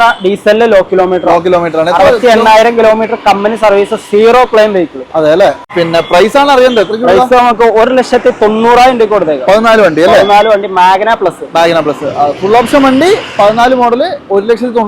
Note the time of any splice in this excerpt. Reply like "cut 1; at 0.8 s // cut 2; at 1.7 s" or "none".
cut 1; at 5.6 s